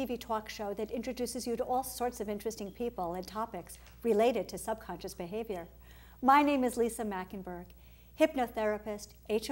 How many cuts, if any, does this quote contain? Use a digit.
0